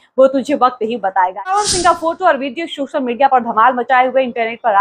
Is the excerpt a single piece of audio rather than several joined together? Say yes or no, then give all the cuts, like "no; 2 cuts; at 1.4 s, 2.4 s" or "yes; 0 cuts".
no; 1 cut; at 1.5 s